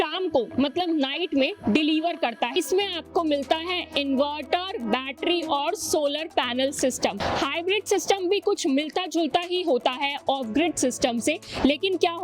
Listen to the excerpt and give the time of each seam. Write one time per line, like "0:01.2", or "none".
0:02.5
0:07.2